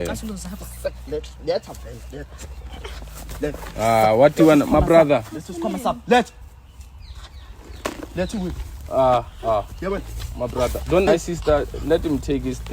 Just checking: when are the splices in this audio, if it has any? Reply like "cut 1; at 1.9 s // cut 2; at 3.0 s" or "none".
cut 1; at 11.1 s